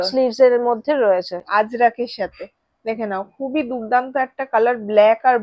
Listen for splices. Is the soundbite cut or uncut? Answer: cut